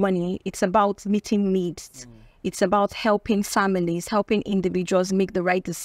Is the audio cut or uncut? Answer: uncut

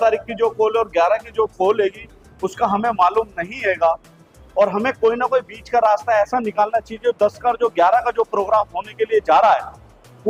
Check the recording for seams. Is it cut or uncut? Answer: uncut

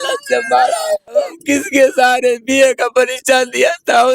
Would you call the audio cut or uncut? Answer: cut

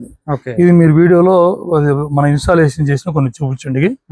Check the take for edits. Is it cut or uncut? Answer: uncut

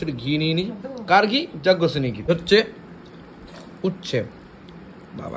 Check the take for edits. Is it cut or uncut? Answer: cut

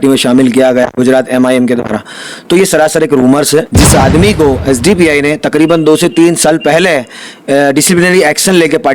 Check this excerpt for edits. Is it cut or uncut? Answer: cut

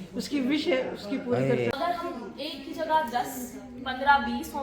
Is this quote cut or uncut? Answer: cut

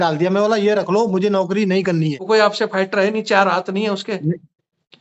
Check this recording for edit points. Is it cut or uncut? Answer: cut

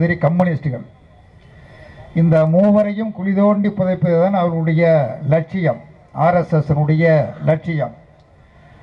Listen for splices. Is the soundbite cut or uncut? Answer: uncut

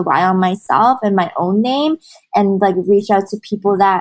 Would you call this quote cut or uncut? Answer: uncut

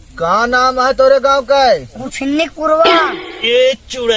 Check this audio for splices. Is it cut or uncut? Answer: cut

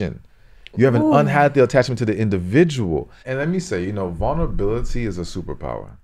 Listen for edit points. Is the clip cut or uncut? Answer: cut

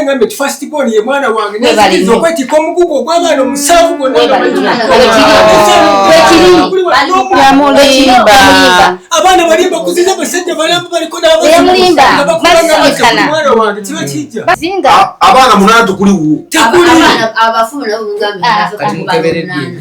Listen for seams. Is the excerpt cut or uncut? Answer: cut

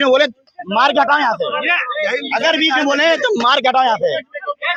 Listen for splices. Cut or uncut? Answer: uncut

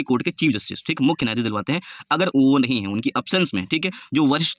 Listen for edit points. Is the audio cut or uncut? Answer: uncut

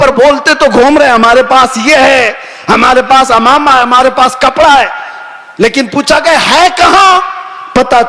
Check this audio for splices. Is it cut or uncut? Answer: uncut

